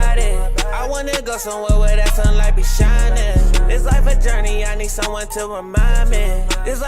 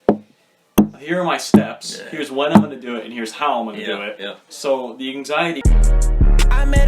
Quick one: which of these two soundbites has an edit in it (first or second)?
second